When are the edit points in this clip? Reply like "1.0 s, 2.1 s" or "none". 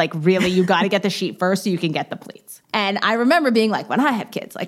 2.6 s